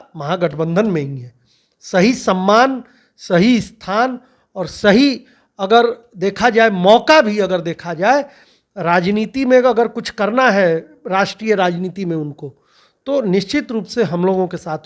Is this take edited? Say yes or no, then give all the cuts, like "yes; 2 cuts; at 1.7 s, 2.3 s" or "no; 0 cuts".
no; 0 cuts